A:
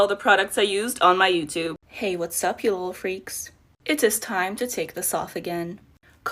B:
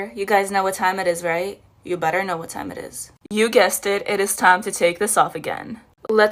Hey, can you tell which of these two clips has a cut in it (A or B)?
A